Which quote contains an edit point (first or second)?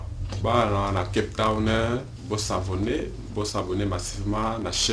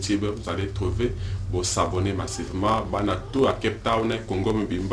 second